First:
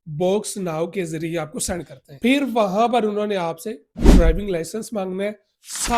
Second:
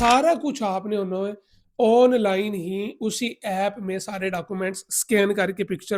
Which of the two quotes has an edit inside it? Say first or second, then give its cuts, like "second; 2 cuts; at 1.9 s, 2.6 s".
first; 1 cut; at 2.0 s